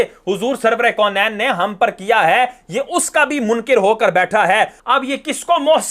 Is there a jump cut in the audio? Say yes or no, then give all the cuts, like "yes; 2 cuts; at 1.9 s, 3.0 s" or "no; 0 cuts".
yes; 1 cut; at 4.8 s